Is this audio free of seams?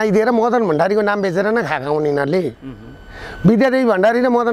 yes; 0 cuts

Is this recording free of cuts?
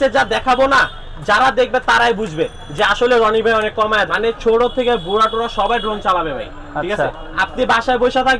no; 1 cut; at 4.1 s

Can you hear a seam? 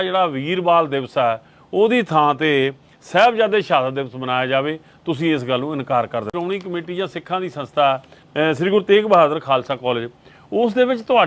yes; 1 cut; at 6.3 s

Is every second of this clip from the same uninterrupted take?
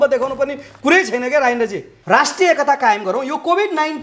no; 1 cut; at 1.9 s

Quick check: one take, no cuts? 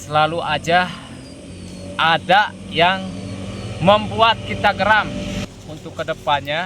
no; 1 cut; at 5.5 s

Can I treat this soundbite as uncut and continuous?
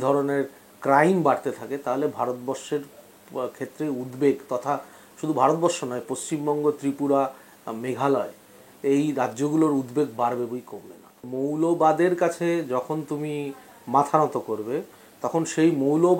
no; 1 cut; at 11.3 s

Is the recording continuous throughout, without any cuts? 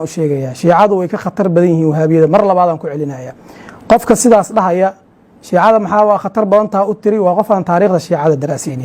yes; 0 cuts

